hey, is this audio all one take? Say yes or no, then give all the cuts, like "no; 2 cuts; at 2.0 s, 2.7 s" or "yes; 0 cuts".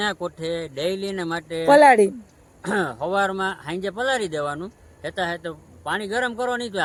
yes; 0 cuts